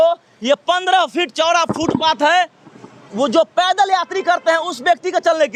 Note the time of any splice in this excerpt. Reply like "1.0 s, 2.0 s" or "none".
none